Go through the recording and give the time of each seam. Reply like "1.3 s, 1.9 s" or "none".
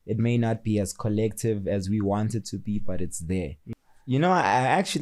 3.6 s